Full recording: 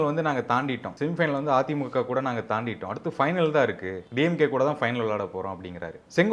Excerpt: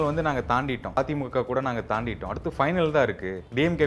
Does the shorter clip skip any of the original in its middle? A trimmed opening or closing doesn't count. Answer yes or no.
yes